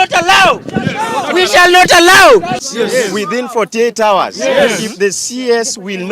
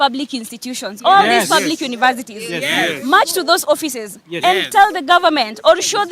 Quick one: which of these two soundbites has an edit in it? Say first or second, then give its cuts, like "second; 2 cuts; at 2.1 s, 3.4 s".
first; 1 cut; at 2.6 s